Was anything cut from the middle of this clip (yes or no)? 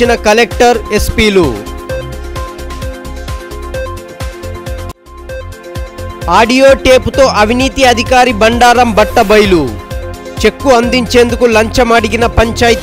no